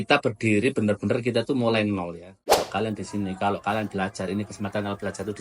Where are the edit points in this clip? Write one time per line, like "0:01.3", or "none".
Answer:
0:02.6